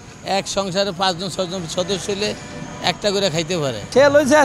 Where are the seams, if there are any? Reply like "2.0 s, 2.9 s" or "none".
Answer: none